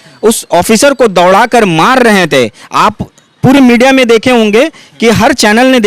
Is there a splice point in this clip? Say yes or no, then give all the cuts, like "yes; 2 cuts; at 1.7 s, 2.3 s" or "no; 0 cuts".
no; 0 cuts